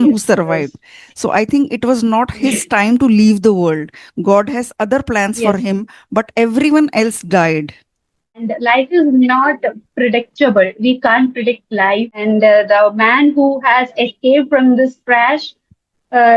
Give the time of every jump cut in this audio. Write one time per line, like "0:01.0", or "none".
0:08.5
0:12.2

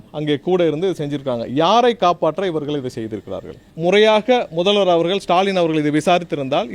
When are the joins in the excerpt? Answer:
0:03.7

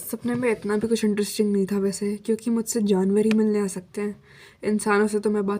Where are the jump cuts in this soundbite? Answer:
none

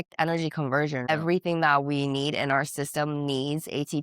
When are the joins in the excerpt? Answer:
0:01.1

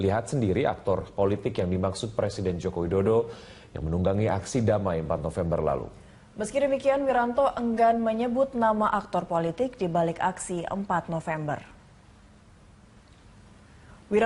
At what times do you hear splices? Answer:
0:03.9

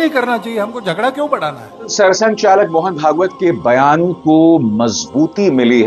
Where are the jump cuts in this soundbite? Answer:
0:01.9

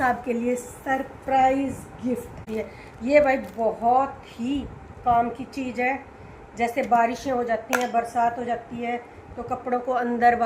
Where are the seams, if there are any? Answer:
0:02.4

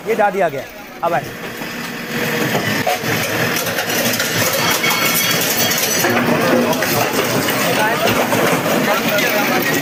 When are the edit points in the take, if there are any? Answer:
none

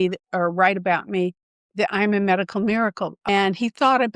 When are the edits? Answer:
0:03.3

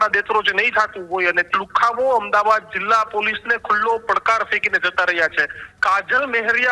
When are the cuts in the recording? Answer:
0:01.4
0:05.7

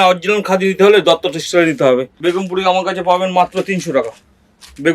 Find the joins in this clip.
0:02.1

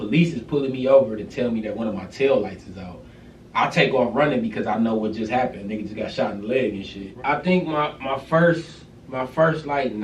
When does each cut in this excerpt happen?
0:07.1

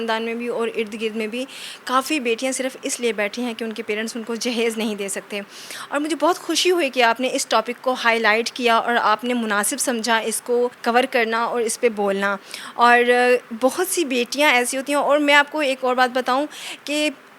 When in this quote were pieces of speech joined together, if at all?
none

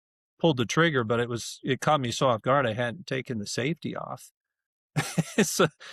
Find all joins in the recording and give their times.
none

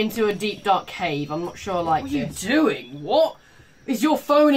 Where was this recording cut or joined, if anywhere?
0:02.1

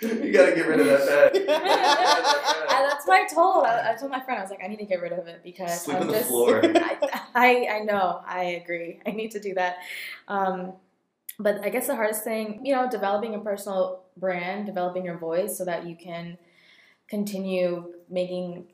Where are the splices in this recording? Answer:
0:12.6

